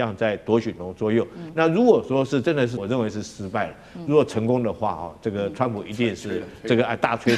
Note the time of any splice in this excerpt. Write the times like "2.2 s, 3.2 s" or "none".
2.8 s